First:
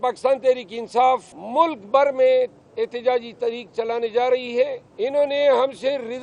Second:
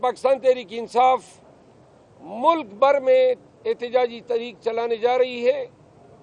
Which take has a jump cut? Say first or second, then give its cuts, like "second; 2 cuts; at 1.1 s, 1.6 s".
first; 2 cuts; at 1.4 s, 4.8 s